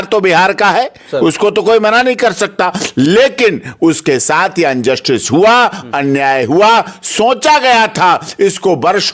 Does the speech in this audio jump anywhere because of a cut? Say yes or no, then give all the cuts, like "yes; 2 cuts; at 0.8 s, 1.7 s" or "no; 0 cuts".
no; 0 cuts